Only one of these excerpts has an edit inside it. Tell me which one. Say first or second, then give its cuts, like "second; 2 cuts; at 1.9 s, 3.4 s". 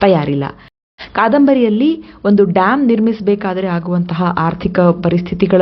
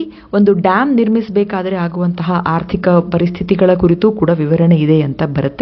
first; 1 cut; at 1.0 s